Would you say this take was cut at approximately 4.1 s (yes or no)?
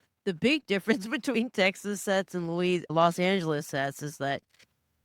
no